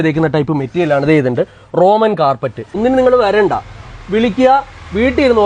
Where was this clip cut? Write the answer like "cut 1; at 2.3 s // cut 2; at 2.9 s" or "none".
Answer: cut 1; at 2.7 s